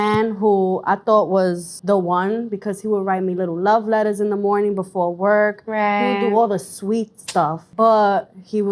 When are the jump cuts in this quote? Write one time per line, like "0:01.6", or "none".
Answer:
0:01.7
0:07.6